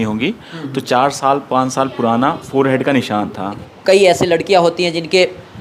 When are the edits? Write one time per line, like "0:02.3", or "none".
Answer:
0:03.6